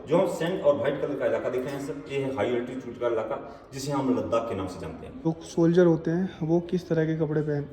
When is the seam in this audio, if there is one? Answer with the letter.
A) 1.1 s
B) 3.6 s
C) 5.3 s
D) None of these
C